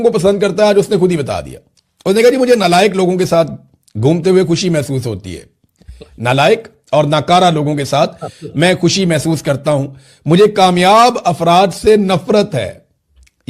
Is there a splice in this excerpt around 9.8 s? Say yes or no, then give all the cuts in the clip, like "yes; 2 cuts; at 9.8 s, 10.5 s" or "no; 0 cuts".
no; 0 cuts